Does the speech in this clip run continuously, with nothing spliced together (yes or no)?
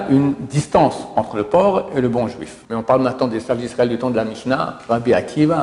no